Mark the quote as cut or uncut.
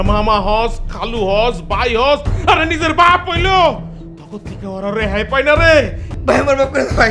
cut